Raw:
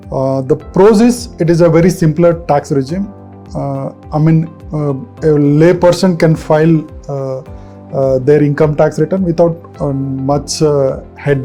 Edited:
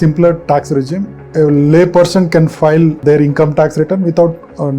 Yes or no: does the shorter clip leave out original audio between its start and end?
yes